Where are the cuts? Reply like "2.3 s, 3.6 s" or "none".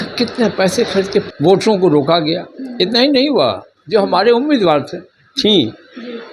1.3 s